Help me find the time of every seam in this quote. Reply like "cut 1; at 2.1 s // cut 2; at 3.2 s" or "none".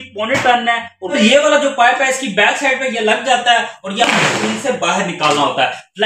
cut 1; at 0.9 s